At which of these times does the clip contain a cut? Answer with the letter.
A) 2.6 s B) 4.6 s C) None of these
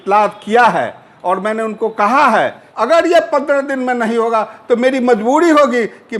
A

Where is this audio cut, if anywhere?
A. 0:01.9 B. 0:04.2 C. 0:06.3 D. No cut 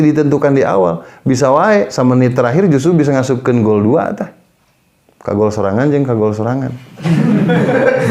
A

